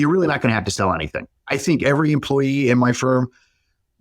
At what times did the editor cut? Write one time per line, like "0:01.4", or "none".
0:01.3